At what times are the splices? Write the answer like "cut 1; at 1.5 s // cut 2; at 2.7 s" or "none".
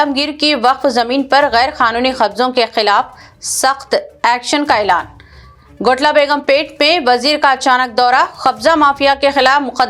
none

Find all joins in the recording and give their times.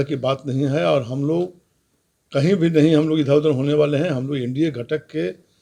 none

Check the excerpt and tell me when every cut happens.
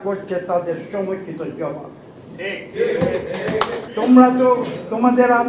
cut 1; at 3.8 s

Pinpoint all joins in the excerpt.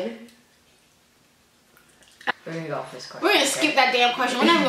cut 1; at 2.3 s

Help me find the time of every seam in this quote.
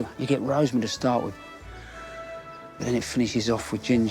none

